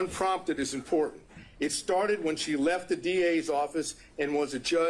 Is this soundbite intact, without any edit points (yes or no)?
yes